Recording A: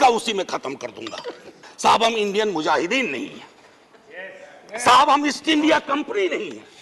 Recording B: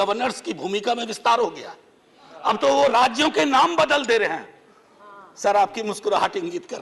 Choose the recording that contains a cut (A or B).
A